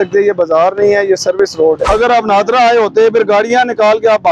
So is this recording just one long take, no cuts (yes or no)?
no